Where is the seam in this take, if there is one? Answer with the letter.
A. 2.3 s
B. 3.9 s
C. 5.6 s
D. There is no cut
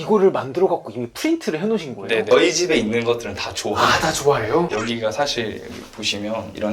A